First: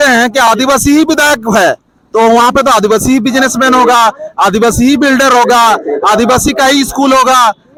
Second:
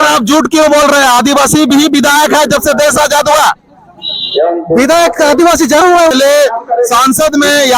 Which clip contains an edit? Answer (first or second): second